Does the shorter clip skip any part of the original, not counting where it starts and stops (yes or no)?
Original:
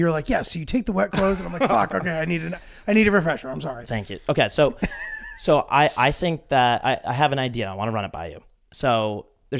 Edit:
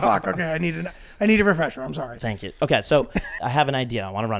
yes